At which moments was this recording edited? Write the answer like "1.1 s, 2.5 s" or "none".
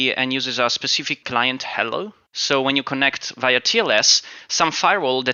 1.2 s, 2.3 s